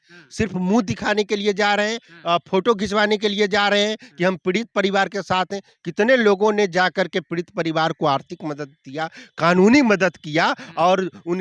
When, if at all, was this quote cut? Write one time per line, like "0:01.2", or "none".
none